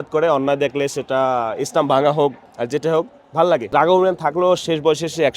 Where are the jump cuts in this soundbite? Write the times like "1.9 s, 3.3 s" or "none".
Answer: 2.5 s, 3.7 s

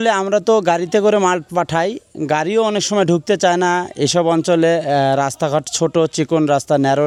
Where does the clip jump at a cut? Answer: none

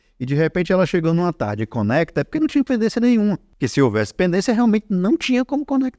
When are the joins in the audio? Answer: 3.5 s

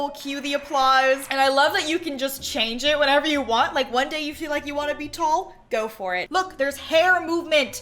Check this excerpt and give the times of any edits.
1.3 s, 6.3 s

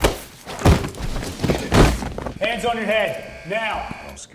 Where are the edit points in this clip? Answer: 2.3 s

